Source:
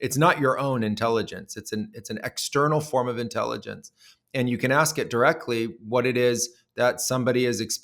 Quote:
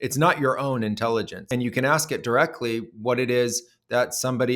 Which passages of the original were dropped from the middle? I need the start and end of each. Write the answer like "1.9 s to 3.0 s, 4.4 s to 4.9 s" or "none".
1.4 s to 4.2 s